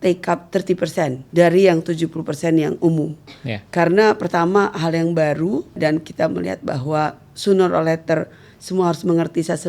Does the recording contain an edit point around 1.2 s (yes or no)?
yes